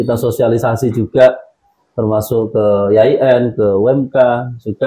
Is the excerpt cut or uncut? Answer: uncut